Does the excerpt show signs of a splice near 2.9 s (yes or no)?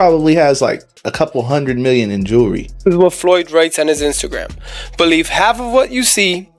yes